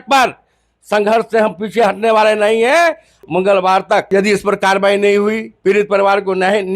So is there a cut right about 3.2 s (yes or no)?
yes